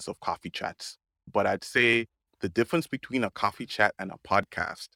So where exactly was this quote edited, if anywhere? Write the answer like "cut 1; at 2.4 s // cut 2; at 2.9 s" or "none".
cut 1; at 1.3 s

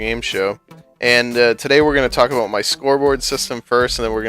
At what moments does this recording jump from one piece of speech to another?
cut 1; at 3.3 s

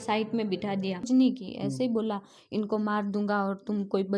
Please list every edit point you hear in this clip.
cut 1; at 1.1 s

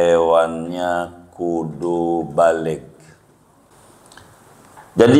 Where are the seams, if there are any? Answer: cut 1; at 3.7 s

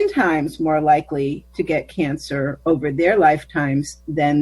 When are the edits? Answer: cut 1; at 1.4 s

